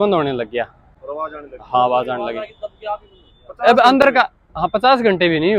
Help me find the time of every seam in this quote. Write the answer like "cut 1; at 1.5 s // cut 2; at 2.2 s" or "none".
none